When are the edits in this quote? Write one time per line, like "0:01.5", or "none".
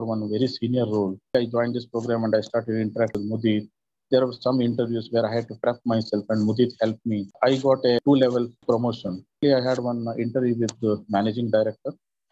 0:01.3
0:07.3
0:09.4